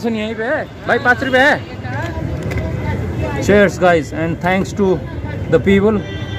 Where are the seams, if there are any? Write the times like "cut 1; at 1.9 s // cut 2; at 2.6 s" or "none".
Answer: cut 1; at 2.0 s